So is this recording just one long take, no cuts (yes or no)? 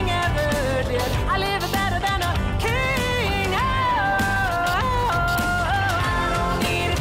yes